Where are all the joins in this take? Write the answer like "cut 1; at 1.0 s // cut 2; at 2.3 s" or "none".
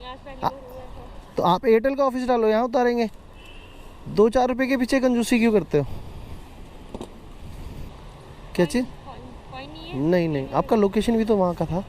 cut 1; at 7.8 s